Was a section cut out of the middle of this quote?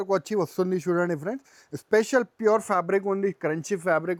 no; 0 cuts

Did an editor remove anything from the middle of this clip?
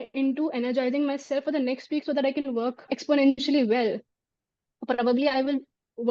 yes; 1 cut; at 3.0 s

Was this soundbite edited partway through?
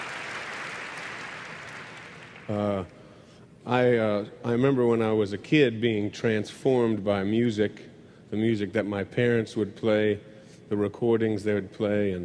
yes; 1 cut; at 6.5 s

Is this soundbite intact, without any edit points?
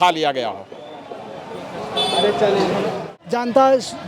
no; 1 cut; at 3.0 s

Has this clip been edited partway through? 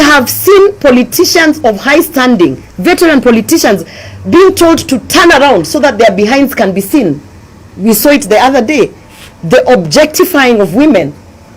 no; 0 cuts

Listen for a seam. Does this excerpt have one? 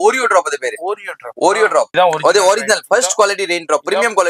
yes; 1 cut; at 1.9 s

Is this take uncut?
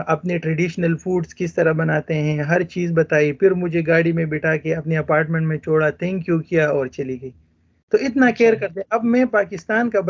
yes; 0 cuts

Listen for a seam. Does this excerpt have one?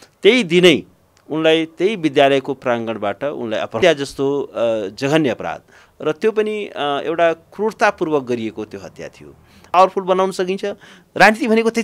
yes; 2 cuts; at 3.8 s, 9.7 s

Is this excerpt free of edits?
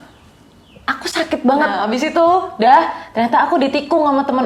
no; 1 cut; at 1.8 s

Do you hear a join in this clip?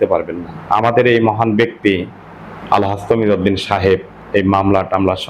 no; 0 cuts

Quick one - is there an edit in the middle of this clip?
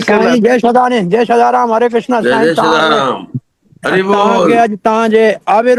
no; 0 cuts

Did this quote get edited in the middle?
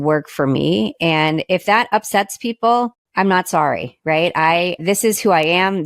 yes; 2 cuts; at 3.0 s, 4.8 s

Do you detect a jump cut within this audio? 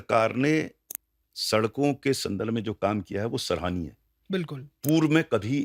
no; 0 cuts

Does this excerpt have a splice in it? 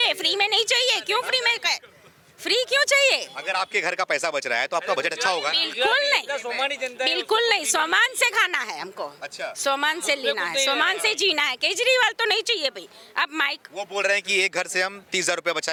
no; 0 cuts

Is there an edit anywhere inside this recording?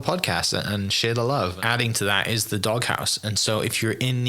yes; 1 cut; at 1.6 s

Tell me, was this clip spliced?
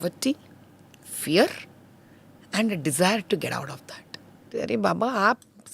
yes; 1 cut; at 4.5 s

